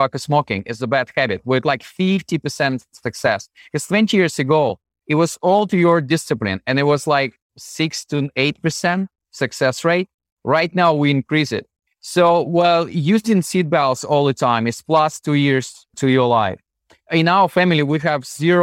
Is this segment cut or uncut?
uncut